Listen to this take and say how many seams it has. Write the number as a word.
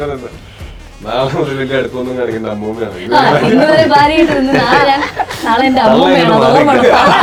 zero